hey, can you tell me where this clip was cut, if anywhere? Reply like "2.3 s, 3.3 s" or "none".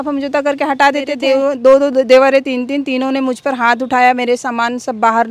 1.2 s

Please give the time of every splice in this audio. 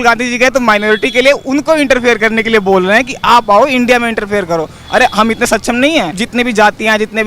6.2 s

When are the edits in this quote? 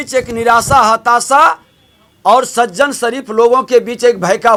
none

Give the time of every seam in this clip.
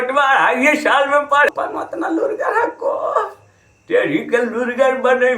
1.5 s

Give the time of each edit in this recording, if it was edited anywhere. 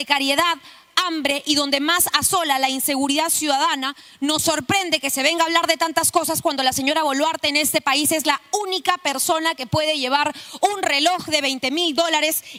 none

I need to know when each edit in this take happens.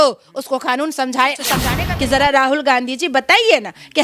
1.5 s

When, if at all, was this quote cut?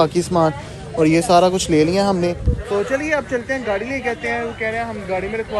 none

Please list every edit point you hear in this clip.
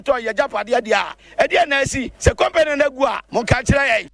1.2 s, 2.1 s, 3.2 s

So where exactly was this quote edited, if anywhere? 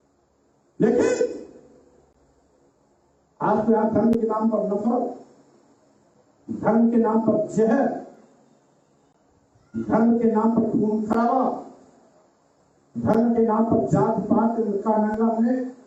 none

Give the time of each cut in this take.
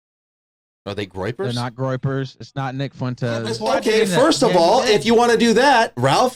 3.5 s

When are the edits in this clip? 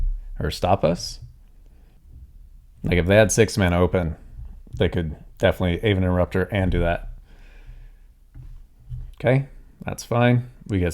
2.0 s

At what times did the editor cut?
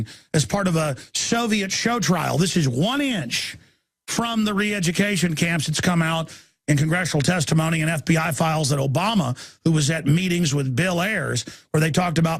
1.5 s

